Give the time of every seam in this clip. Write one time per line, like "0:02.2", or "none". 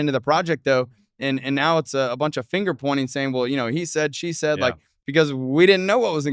0:04.9